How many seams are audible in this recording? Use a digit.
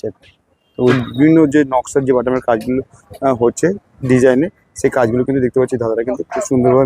1